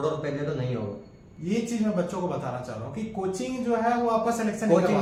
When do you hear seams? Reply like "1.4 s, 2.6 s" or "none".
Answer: none